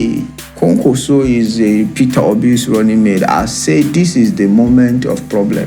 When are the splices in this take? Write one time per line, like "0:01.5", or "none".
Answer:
none